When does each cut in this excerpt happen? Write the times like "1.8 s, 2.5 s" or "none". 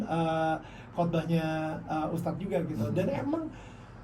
none